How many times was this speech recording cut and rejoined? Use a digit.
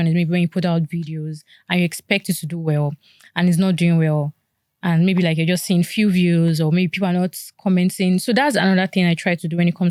0